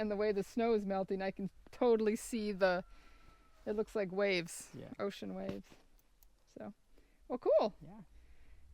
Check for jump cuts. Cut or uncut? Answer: uncut